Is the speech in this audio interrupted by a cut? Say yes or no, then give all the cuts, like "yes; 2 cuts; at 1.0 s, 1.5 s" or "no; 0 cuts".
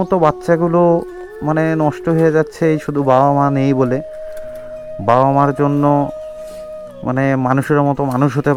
no; 0 cuts